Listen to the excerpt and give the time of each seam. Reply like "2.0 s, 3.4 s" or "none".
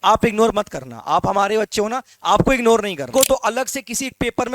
3.1 s

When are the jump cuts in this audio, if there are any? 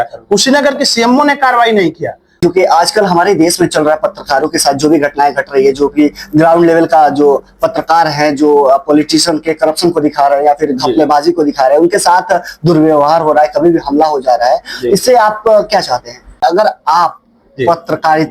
2.4 s, 16.4 s

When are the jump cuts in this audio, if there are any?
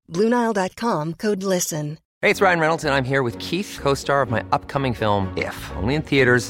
2.0 s

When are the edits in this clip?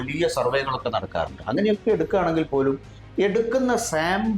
none

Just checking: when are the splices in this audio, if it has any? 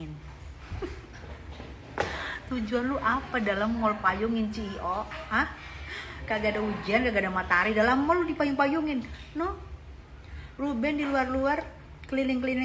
none

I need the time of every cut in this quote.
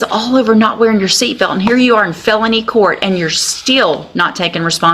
none

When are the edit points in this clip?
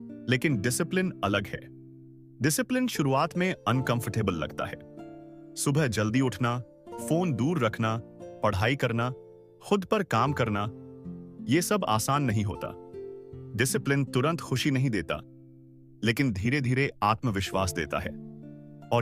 none

